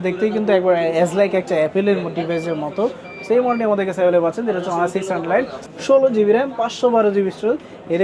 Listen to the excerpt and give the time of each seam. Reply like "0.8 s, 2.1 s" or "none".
5.7 s